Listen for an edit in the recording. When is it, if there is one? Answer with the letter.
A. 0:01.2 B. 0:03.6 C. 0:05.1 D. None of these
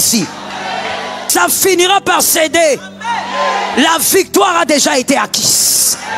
A